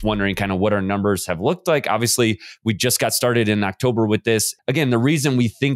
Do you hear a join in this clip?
yes; 1 cut; at 4.5 s

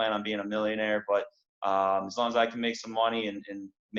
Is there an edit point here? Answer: no; 0 cuts

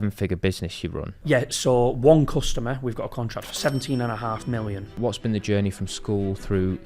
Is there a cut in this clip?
yes; 3 cuts; at 1.1 s, 3.5 s, 5.0 s

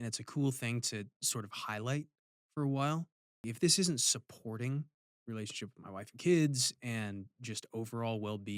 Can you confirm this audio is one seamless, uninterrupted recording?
no; 2 cuts; at 3.4 s, 5.1 s

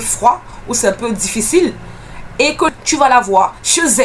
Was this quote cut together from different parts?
yes; 1 cut; at 2.7 s

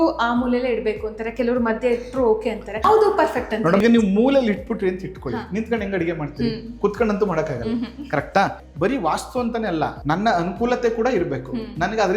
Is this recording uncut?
no; 4 cuts; at 2.8 s, 3.8 s, 8.6 s, 10.0 s

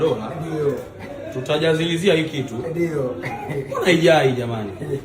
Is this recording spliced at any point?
no; 0 cuts

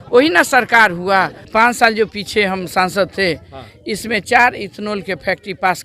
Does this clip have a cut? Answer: yes; 1 cut; at 1.4 s

